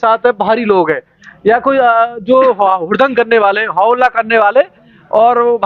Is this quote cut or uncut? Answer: uncut